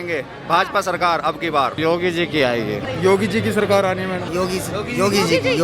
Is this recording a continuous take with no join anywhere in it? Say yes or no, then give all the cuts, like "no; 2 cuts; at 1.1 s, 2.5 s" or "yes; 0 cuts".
no; 3 cuts; at 1.8 s, 2.9 s, 4.2 s